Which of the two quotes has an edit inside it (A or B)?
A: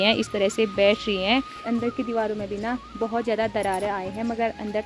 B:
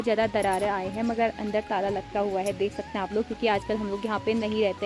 A